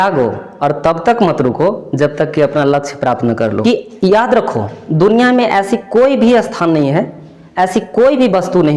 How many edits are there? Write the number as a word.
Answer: one